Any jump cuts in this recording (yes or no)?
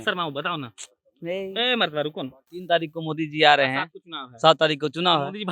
yes